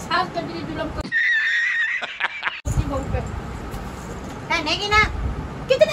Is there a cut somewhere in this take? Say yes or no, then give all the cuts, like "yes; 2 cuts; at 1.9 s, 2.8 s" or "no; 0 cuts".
no; 0 cuts